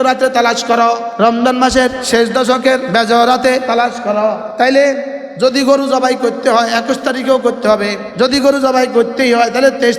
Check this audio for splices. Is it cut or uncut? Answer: cut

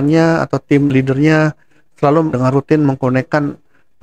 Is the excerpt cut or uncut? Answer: cut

